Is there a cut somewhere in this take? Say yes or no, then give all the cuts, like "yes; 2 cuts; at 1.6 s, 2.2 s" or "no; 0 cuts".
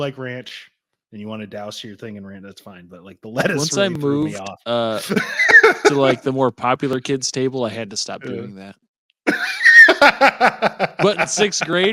no; 0 cuts